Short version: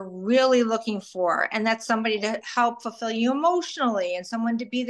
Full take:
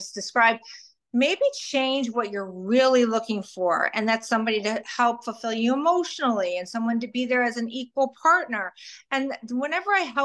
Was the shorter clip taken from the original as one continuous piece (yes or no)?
yes